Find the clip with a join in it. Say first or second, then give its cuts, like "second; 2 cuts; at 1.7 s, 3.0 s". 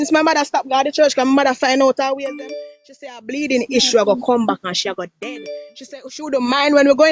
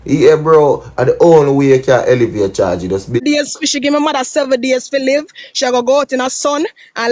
second; 1 cut; at 3.2 s